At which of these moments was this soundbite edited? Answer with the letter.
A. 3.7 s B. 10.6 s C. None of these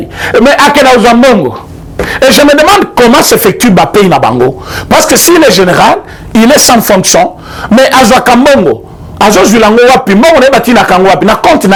C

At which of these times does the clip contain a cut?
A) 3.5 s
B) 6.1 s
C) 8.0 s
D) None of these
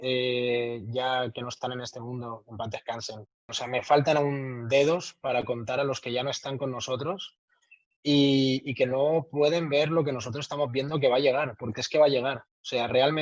A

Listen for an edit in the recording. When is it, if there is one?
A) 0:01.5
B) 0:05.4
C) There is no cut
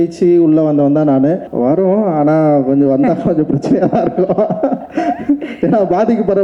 A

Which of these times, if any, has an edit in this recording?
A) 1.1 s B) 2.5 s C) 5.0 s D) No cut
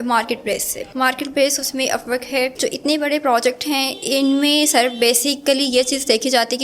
B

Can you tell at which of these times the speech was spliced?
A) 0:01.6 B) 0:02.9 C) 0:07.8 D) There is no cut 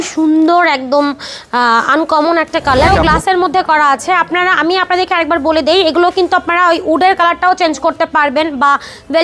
B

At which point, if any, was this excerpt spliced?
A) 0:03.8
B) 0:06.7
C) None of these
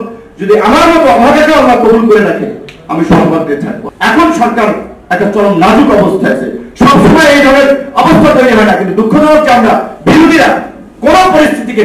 A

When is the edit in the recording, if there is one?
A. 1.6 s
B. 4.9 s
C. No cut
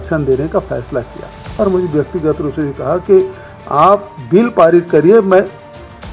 A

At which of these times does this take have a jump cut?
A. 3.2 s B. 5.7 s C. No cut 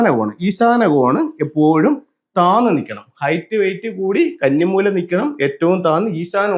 C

